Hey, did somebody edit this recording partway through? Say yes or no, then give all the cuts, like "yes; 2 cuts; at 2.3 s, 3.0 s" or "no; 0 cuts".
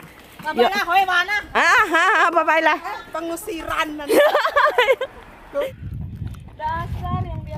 yes; 1 cut; at 5.6 s